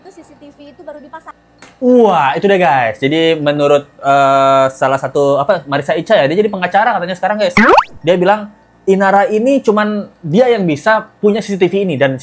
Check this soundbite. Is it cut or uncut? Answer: uncut